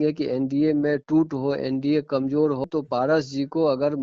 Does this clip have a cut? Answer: yes; 1 cut; at 2.6 s

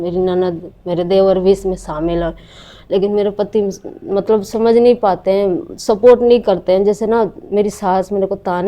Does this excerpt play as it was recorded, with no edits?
yes; 0 cuts

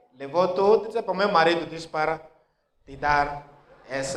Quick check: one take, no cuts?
yes; 0 cuts

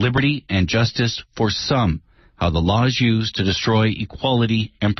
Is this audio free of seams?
yes; 0 cuts

